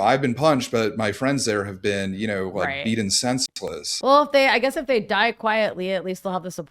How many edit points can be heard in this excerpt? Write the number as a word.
one